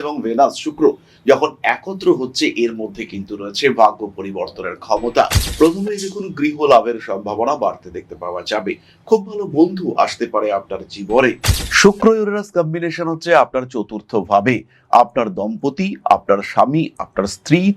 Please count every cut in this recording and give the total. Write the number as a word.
two